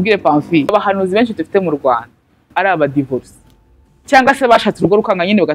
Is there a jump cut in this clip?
yes; 2 cuts; at 0.7 s, 2.5 s

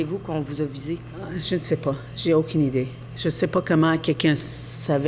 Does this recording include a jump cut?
yes; 1 cut; at 1.2 s

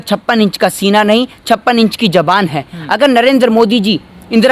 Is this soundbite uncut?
yes; 0 cuts

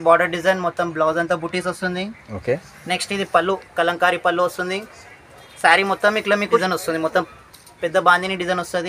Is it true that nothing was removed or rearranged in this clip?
no; 1 cut; at 6.6 s

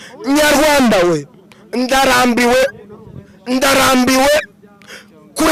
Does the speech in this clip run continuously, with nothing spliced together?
yes; 0 cuts

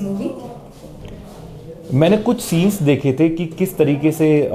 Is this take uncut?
yes; 0 cuts

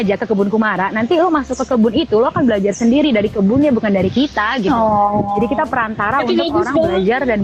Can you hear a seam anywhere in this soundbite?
no; 0 cuts

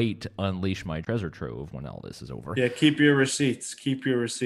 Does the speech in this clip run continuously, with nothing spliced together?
no; 2 cuts; at 1.0 s, 2.5 s

